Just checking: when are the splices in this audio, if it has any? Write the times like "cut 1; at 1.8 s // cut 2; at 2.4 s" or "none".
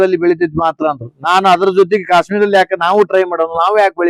none